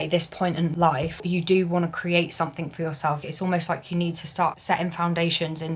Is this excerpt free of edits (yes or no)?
no